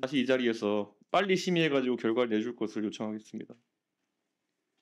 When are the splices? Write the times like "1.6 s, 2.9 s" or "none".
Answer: none